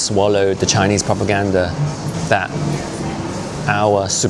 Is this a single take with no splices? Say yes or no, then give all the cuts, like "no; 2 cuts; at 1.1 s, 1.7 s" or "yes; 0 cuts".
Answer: no; 1 cut; at 2.2 s